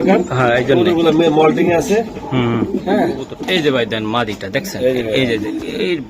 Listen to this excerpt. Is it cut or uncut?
cut